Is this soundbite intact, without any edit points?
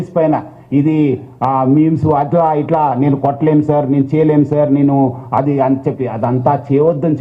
yes; 0 cuts

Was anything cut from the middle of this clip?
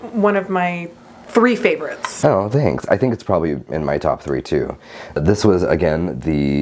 yes; 1 cut; at 5.0 s

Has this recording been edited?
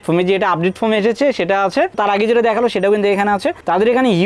no; 0 cuts

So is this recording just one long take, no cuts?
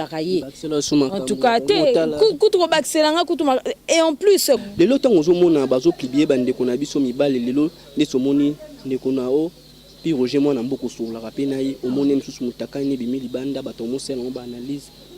no; 1 cut; at 4.6 s

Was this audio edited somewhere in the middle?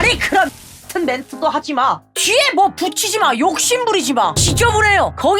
no; 0 cuts

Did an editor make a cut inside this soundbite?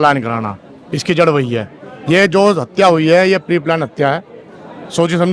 no; 0 cuts

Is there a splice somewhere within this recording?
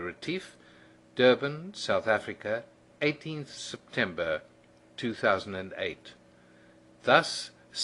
no; 0 cuts

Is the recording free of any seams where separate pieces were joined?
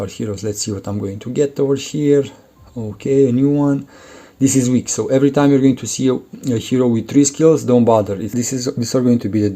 no; 1 cut; at 8.3 s

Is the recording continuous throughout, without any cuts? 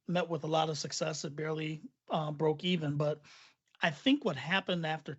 yes; 0 cuts

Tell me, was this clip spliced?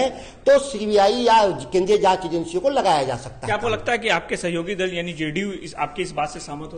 no; 0 cuts

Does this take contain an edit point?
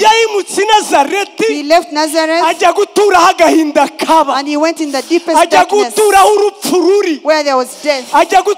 no; 0 cuts

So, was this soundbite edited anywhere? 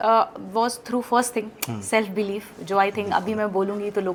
no; 0 cuts

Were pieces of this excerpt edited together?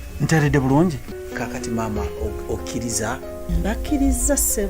yes; 1 cut; at 1.1 s

